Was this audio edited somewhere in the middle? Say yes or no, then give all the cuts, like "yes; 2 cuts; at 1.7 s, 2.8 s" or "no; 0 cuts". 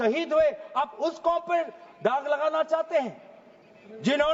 no; 0 cuts